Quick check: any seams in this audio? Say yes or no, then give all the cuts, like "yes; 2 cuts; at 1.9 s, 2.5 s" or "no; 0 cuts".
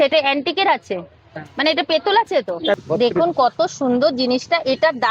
yes; 1 cut; at 2.8 s